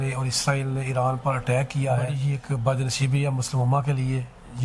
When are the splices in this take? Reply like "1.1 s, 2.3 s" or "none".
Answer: 2.2 s